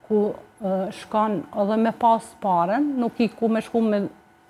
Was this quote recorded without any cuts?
yes; 0 cuts

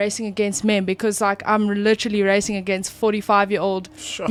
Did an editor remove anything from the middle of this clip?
no; 0 cuts

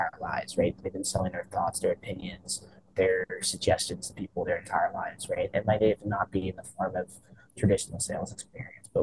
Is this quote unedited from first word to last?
yes; 0 cuts

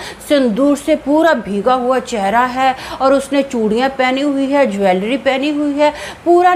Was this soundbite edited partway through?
no; 0 cuts

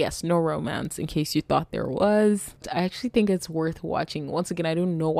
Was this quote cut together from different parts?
yes; 1 cut; at 2.6 s

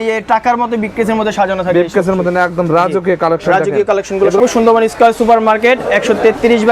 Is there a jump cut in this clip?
yes; 1 cut; at 4.4 s

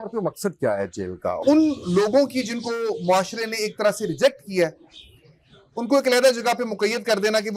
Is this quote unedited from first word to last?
no; 1 cut; at 1.4 s

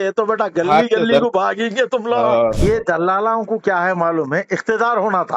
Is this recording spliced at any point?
yes; 1 cut; at 2.6 s

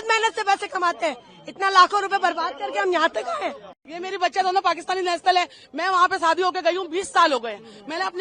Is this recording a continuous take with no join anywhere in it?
no; 1 cut; at 3.8 s

